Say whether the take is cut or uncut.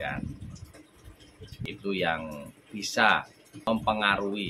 cut